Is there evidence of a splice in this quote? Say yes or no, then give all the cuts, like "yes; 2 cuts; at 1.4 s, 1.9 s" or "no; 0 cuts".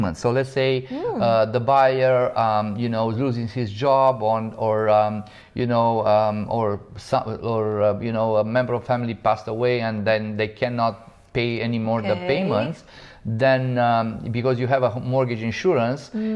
no; 0 cuts